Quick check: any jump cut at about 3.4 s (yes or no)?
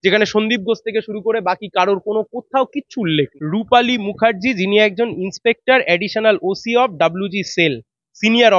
yes